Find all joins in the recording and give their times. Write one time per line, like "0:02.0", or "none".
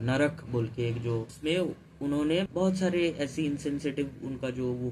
0:01.3
0:02.5